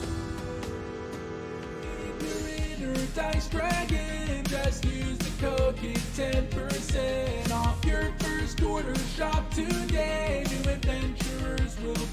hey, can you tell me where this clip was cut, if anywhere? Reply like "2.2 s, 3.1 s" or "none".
2.2 s

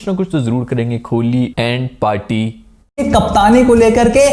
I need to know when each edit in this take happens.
3.0 s

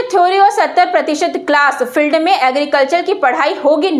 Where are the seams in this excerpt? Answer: none

